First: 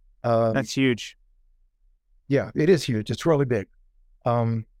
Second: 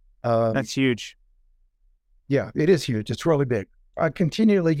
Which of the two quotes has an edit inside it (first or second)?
second